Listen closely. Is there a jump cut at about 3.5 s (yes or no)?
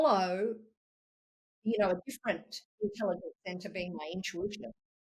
no